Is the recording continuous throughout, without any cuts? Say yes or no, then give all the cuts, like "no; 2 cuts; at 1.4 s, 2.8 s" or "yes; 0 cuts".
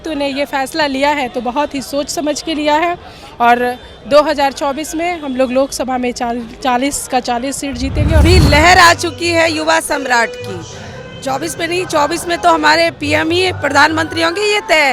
no; 1 cut; at 8.2 s